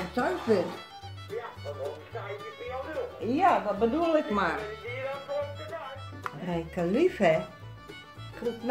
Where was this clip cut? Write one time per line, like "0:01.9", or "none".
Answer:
0:06.1